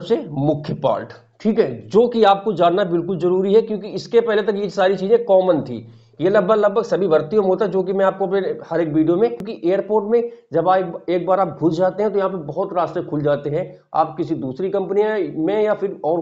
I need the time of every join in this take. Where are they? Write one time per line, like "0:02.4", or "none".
0:09.5